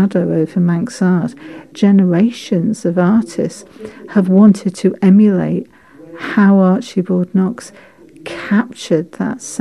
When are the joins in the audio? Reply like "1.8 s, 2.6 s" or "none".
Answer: 1.6 s